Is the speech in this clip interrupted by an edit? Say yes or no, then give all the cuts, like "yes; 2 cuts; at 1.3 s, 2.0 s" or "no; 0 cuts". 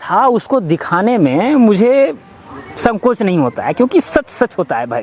no; 0 cuts